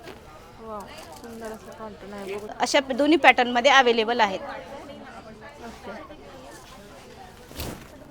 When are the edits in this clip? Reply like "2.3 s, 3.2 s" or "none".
2.5 s